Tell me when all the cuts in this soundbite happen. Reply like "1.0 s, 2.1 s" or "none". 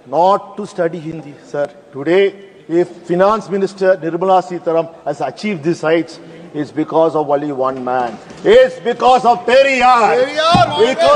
none